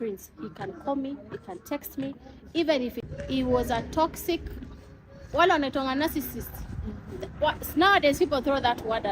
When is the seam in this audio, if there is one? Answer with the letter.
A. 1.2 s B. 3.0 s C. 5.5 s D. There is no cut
B